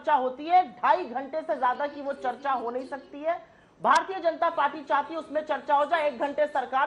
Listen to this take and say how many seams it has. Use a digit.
0